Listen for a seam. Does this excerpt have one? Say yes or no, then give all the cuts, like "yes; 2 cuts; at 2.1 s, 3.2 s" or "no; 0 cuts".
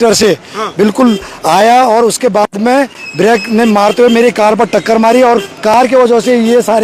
no; 0 cuts